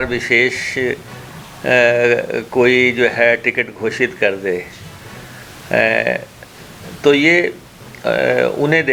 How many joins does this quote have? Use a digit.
0